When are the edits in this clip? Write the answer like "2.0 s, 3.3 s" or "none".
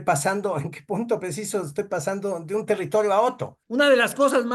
3.5 s